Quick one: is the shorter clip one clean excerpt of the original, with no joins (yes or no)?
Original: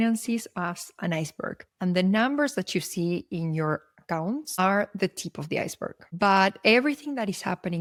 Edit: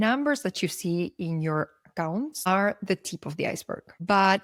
yes